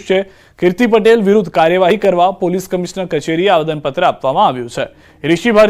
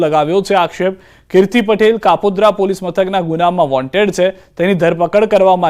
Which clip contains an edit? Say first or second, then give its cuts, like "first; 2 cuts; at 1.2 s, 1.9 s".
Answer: second; 1 cut; at 2.0 s